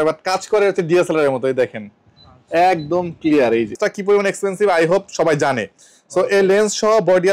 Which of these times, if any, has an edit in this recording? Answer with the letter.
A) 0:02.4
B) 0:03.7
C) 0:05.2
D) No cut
B